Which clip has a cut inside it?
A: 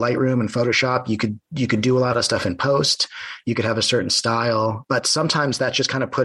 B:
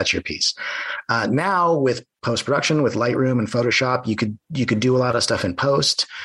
A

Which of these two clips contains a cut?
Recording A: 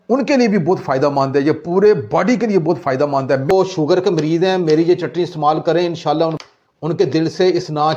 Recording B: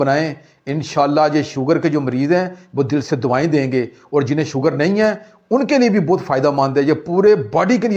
A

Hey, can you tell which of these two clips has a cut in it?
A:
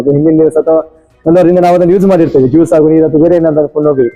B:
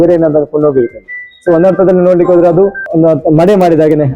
B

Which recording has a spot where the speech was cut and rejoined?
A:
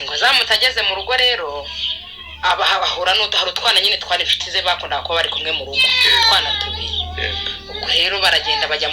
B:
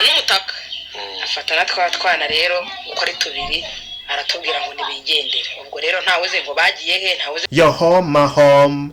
B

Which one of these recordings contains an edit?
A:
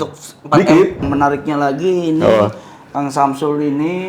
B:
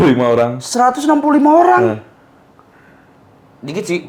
A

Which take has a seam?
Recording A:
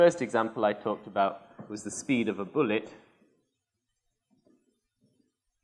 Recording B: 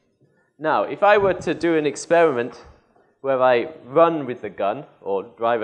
A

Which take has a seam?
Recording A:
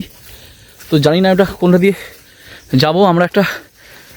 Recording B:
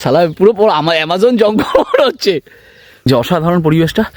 B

